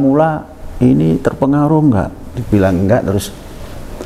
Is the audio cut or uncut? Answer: uncut